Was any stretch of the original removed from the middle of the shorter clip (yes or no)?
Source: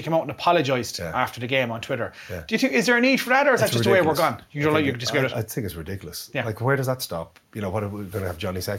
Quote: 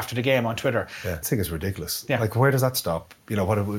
yes